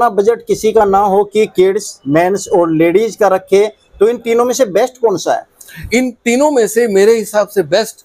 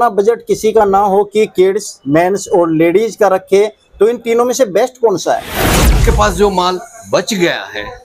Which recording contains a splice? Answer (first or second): second